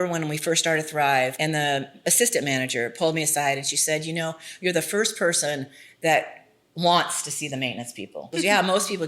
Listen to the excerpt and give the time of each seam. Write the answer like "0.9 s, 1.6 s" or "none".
1.3 s, 8.2 s